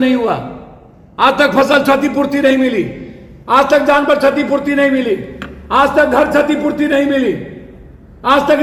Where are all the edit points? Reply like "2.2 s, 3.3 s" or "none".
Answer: none